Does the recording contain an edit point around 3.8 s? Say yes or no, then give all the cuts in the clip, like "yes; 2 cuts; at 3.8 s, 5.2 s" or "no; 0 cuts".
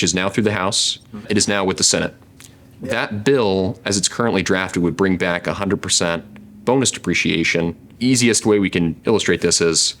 no; 2 cuts; at 1.2 s, 7.8 s